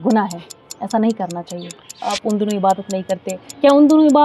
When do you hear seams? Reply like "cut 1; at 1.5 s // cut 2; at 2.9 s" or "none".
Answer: cut 1; at 2.0 s